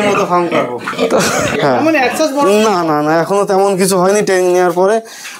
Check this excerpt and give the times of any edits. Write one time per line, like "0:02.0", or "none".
0:01.6